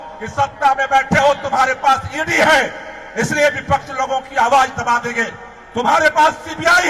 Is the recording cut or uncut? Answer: uncut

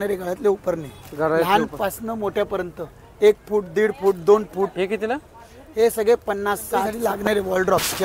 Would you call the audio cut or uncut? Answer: cut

